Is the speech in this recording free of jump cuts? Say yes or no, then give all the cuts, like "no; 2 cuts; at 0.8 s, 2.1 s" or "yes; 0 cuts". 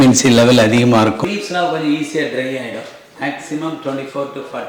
no; 1 cut; at 1.2 s